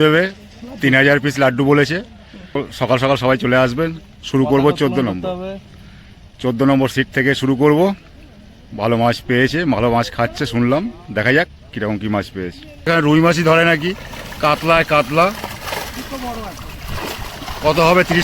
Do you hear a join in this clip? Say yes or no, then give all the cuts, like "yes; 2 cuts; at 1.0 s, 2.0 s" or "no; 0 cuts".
yes; 2 cuts; at 2.5 s, 12.9 s